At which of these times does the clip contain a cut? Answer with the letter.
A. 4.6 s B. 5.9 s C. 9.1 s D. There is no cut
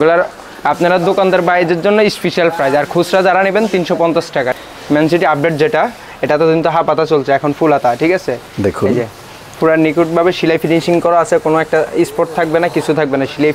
A